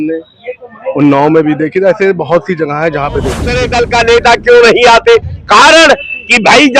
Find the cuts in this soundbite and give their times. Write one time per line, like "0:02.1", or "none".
0:03.6

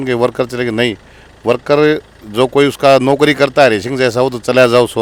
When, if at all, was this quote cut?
none

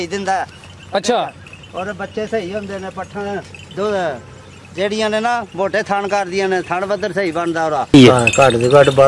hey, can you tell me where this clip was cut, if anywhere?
0:07.9

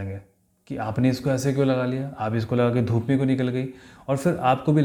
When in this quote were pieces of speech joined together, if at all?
none

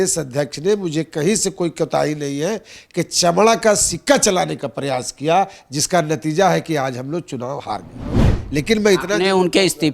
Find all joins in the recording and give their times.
0:08.4

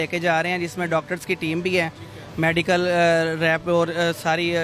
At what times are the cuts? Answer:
none

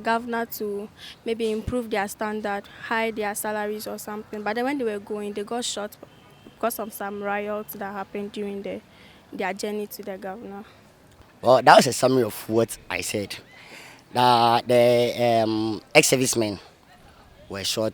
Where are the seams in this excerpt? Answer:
0:11.1

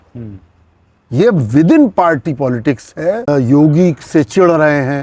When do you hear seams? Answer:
0:03.3

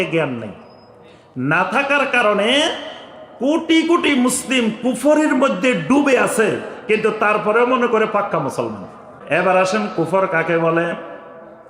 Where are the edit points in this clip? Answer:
0:09.1

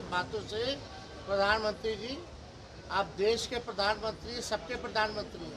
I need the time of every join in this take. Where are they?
none

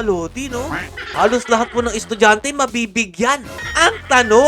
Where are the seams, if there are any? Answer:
0:01.0
0:03.6

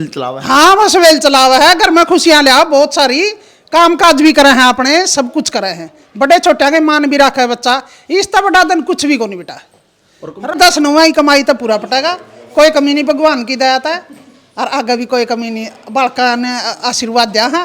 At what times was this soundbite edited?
0:10.6

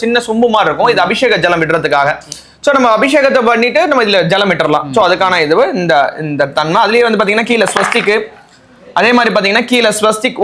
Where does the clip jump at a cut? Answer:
none

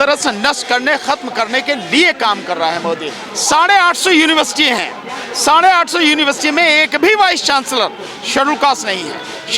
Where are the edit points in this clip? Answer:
0:03.2

